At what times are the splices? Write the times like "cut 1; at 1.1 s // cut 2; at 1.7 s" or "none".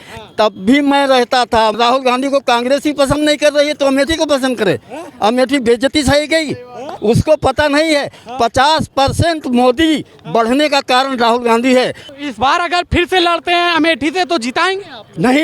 cut 1; at 1.8 s // cut 2; at 6.9 s // cut 3; at 12.1 s